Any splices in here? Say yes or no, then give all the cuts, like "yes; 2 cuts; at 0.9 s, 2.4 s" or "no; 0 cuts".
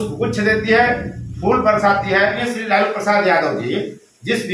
yes; 1 cut; at 2.5 s